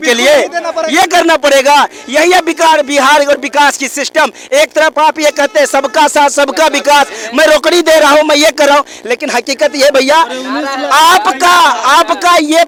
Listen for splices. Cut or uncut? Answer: uncut